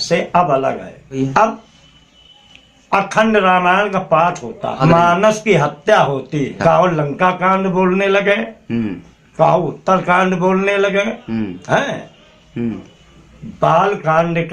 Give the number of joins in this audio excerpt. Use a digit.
3